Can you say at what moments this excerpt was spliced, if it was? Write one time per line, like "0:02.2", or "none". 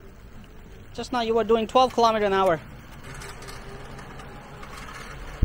0:03.0

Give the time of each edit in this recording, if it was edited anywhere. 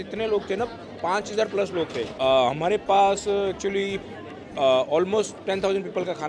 0:02.1

